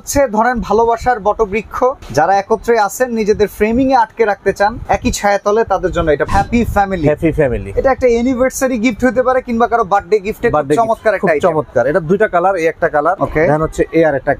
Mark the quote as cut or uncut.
cut